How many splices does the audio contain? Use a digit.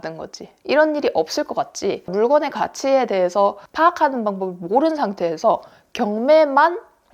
2